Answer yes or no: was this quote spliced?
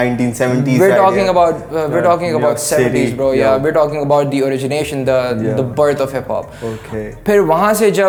no